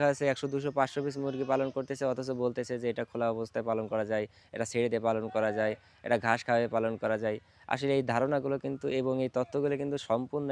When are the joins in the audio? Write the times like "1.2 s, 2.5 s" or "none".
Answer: none